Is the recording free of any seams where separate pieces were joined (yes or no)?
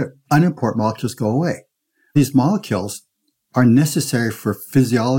no